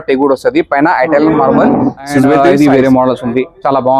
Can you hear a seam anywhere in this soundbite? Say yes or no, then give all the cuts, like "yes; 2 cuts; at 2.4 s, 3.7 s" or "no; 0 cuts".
yes; 1 cut; at 2.4 s